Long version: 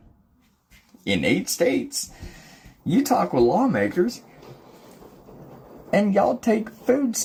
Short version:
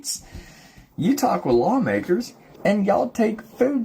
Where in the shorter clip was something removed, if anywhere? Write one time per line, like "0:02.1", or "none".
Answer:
0:02.4